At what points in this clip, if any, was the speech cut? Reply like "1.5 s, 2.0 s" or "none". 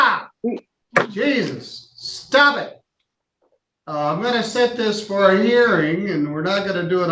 none